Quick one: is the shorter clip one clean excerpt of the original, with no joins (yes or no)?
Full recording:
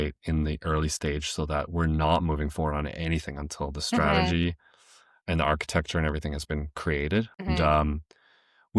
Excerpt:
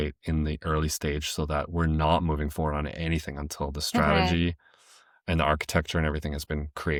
yes